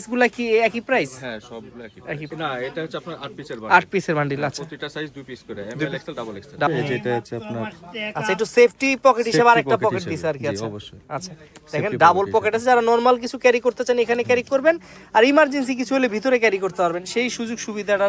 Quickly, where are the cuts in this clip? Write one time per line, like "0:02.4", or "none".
0:02.3
0:06.7

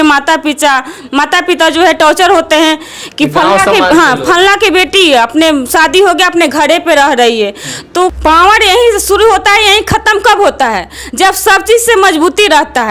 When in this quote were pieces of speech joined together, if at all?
none

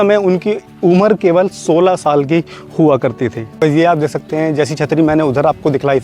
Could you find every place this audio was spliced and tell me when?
0:03.4

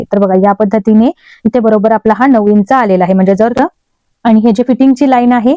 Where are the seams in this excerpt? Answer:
0:03.5

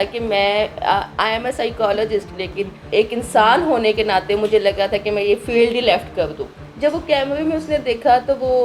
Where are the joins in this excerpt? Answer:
0:02.9
0:06.6

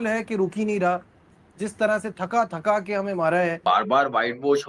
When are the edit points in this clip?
0:01.3
0:03.6

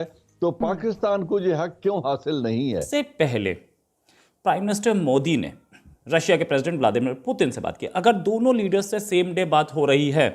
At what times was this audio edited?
0:02.9

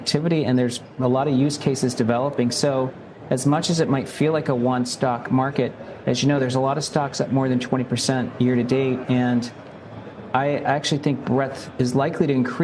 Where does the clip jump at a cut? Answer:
none

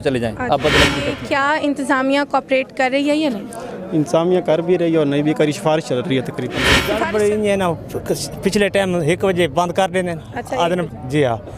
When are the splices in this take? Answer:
0:01.1
0:06.9

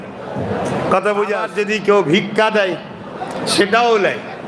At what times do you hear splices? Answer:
0:01.5

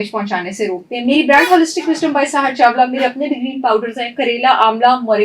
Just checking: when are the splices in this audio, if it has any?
none

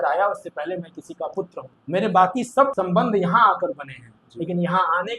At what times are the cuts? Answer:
0:01.7
0:02.7

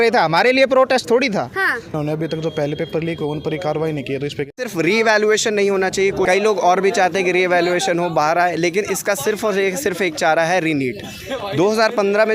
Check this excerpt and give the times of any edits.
0:02.0
0:04.6
0:06.3

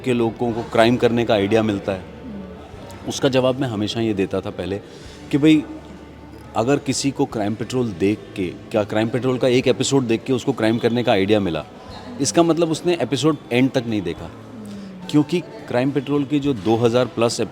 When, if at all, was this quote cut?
none

